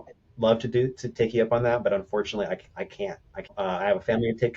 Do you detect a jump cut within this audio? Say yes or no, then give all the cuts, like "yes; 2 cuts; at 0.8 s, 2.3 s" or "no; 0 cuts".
yes; 1 cut; at 3.6 s